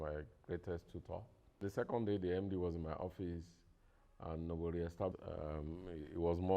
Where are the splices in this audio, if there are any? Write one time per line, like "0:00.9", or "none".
0:01.6
0:05.1